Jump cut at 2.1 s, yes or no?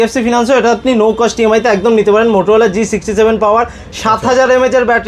no